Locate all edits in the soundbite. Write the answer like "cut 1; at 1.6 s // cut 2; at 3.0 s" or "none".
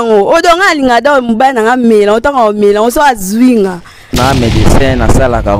cut 1; at 4.2 s